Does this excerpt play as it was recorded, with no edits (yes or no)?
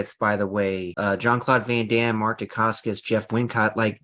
no